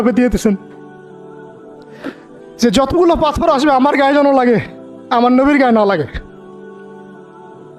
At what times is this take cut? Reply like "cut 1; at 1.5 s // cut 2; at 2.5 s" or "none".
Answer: none

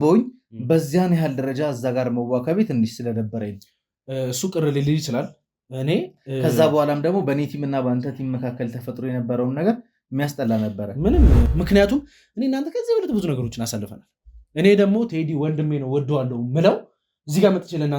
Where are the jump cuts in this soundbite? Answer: cut 1; at 11.5 s

